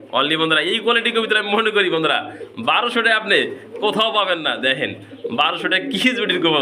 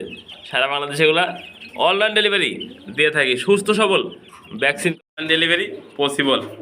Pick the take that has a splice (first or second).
second